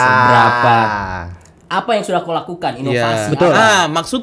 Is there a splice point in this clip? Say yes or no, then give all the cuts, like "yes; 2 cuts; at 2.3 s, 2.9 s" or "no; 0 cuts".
no; 0 cuts